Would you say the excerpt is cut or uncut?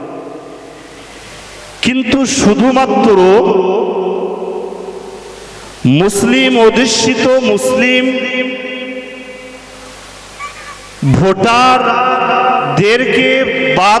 uncut